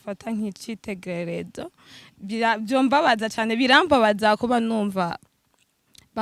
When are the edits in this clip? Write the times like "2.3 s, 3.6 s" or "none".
none